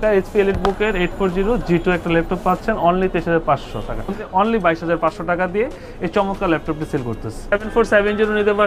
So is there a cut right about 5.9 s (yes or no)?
no